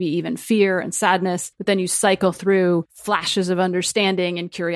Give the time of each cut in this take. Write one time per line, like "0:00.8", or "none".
0:01.5
0:02.9

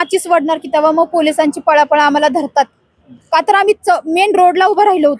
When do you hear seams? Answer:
none

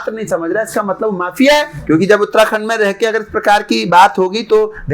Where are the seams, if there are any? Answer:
0:01.8

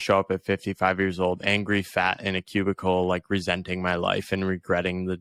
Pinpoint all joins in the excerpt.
none

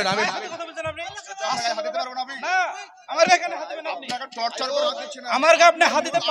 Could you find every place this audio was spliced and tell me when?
none

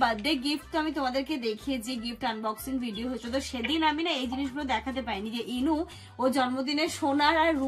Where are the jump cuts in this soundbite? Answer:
none

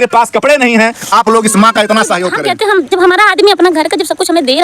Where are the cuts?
0:02.3

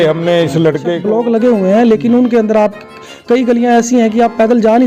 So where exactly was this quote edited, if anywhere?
0:01.0

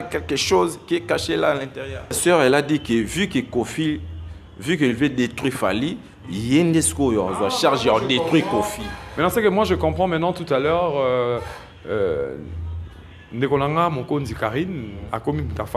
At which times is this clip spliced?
0:02.2

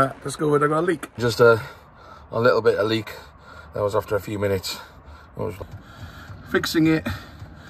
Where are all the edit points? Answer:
0:01.2
0:05.6

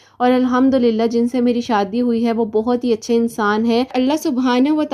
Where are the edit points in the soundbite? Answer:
0:03.9

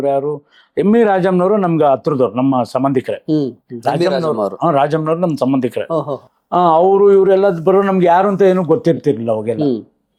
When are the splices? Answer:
none

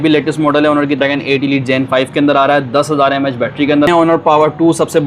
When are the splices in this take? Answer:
0:01.0
0:03.9

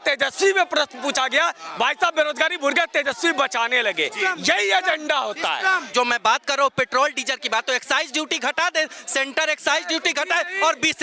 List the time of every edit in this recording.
0:05.9

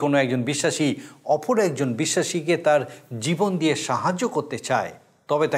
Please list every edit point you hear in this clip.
none

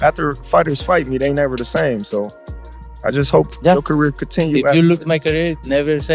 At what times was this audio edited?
none

